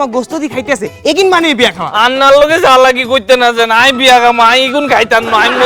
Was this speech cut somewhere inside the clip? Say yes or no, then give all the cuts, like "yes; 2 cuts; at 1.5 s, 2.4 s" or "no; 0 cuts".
no; 0 cuts